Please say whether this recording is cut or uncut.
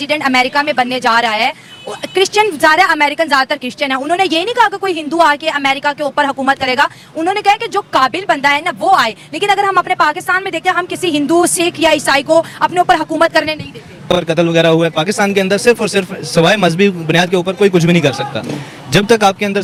uncut